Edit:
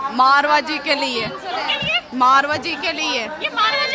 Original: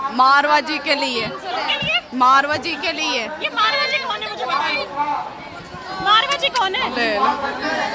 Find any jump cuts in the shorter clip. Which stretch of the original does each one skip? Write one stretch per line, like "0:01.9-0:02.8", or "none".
none